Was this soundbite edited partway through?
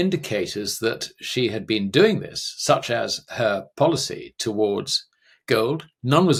no; 0 cuts

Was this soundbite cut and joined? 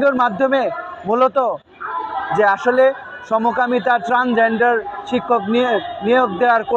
no; 0 cuts

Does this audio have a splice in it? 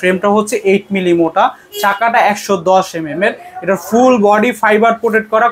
no; 0 cuts

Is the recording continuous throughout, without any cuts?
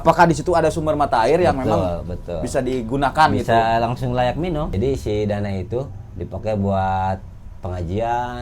no; 1 cut; at 4.7 s

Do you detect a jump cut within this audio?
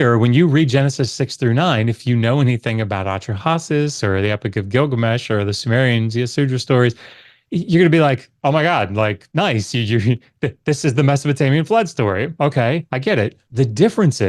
no; 0 cuts

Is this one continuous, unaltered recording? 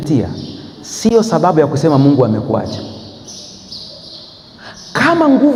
yes; 0 cuts

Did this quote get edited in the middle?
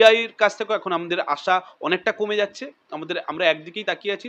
no; 0 cuts

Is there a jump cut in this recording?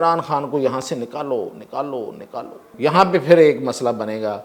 yes; 1 cut; at 2.7 s

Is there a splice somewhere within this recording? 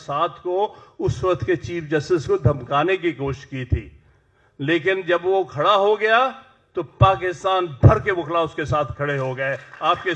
no; 0 cuts

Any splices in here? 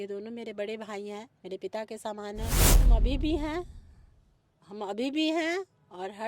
yes; 1 cut; at 2.8 s

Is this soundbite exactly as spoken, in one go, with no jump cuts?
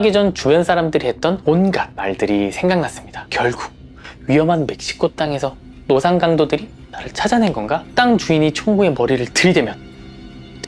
no; 1 cut; at 1.7 s

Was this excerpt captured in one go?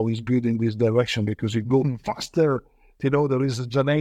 yes; 0 cuts

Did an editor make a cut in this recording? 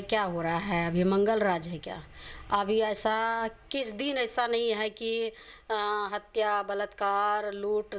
no; 0 cuts

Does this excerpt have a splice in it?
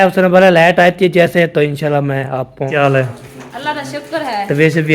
yes; 1 cut; at 2.7 s

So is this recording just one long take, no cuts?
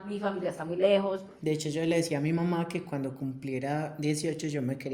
no; 1 cut; at 1.3 s

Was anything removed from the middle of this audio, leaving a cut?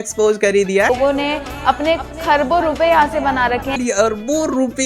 yes; 2 cuts; at 0.9 s, 3.7 s

